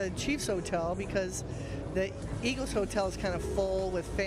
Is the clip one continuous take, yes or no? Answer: yes